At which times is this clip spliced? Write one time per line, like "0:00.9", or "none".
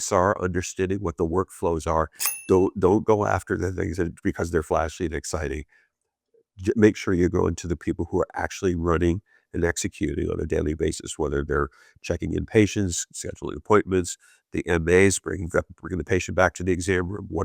0:02.3